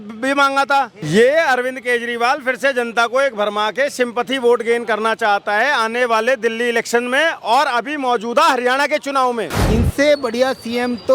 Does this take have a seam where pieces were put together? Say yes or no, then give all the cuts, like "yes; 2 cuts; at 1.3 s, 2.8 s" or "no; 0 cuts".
yes; 2 cuts; at 1.0 s, 9.5 s